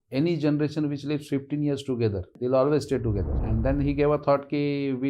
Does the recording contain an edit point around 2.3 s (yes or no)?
yes